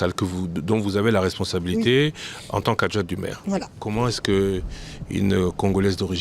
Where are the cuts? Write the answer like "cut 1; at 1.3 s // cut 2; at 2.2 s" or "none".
cut 1; at 3.8 s